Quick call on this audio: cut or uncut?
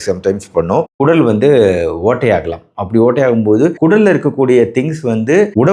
cut